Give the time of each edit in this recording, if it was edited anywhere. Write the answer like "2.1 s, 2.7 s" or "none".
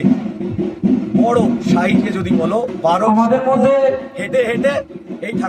none